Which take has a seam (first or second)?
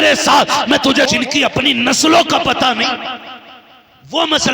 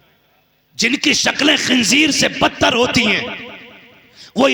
first